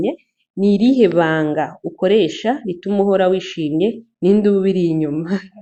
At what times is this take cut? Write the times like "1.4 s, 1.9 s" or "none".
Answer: none

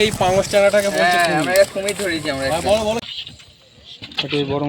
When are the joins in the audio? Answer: 3.1 s

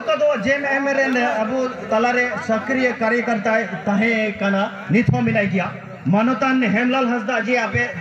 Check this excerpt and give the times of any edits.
none

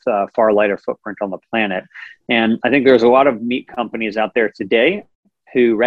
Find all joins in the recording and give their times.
none

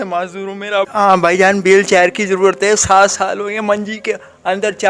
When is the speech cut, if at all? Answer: 0.9 s

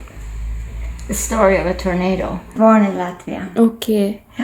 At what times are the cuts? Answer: 2.5 s

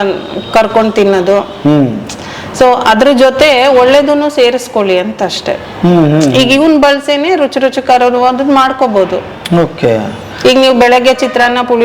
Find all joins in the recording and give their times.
none

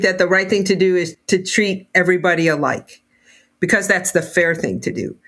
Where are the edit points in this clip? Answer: 1.1 s

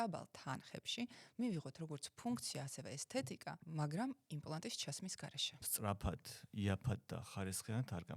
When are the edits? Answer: 3.6 s, 5.7 s

